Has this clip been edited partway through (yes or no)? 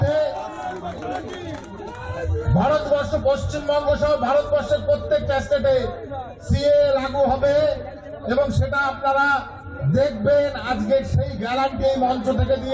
no